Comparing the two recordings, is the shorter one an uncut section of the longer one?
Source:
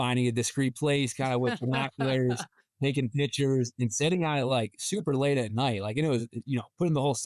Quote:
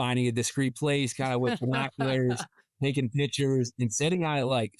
yes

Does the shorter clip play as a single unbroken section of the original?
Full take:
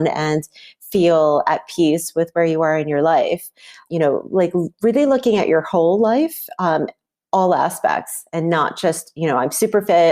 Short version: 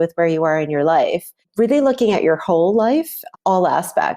no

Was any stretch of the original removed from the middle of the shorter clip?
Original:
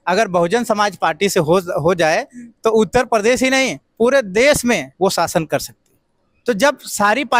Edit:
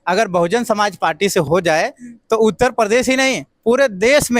yes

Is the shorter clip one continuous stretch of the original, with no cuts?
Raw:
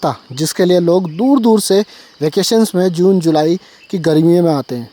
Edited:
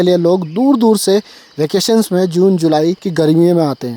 no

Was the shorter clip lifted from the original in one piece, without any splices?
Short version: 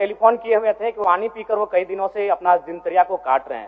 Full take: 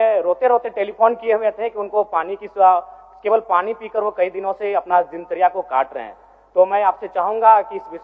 no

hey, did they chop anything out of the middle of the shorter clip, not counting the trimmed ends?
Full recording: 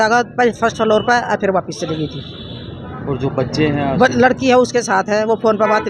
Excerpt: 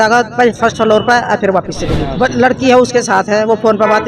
yes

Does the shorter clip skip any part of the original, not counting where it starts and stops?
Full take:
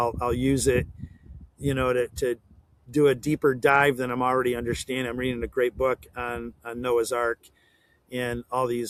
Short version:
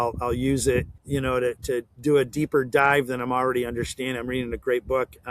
yes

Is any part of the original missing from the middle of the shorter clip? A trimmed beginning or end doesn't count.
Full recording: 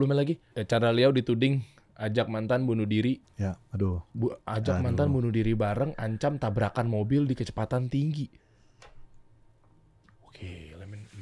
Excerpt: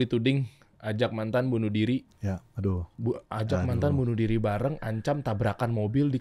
no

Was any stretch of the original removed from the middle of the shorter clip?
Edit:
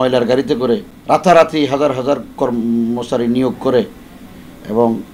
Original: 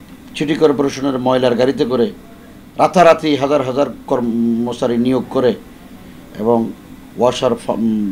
yes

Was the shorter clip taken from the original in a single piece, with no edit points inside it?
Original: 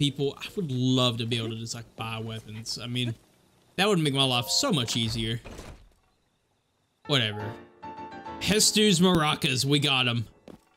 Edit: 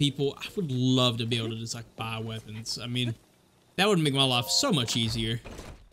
yes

